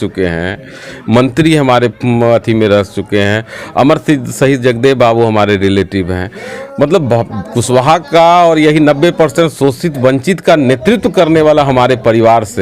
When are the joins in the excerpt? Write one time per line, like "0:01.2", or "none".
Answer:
none